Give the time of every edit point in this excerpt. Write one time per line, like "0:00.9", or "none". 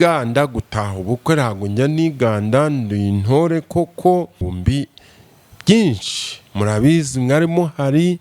0:04.5